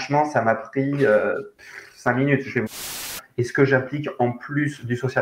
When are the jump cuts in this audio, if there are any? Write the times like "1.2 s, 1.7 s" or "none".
3.1 s